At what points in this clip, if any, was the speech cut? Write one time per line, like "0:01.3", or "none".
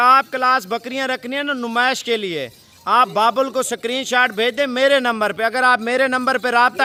none